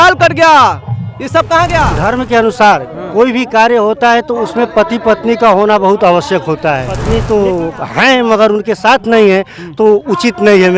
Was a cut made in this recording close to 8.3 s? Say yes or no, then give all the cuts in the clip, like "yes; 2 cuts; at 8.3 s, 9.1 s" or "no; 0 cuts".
no; 2 cuts; at 1.9 s, 7.0 s